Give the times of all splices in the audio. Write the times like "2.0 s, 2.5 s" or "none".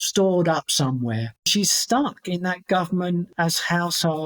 1.4 s, 3.3 s